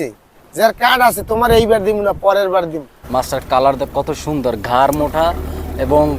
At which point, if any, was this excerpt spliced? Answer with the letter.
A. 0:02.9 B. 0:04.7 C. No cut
A